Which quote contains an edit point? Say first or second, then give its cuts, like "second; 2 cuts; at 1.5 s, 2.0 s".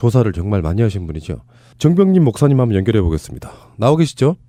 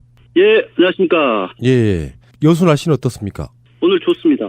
second; 1 cut; at 2.2 s